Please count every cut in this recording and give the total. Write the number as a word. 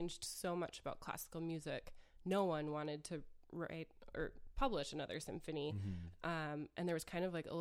zero